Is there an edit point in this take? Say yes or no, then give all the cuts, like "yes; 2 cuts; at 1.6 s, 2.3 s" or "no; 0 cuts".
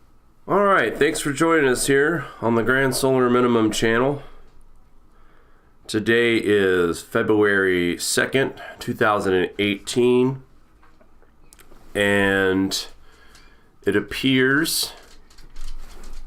no; 0 cuts